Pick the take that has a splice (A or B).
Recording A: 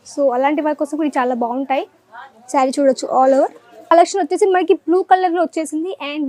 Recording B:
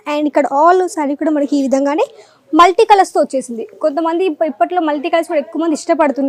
A